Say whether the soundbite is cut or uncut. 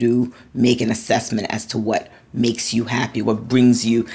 cut